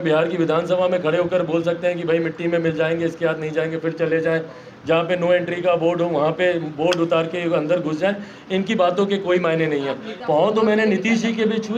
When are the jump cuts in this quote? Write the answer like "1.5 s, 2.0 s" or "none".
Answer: 10.1 s